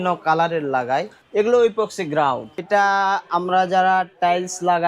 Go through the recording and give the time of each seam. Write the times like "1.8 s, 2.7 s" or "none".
1.2 s, 2.6 s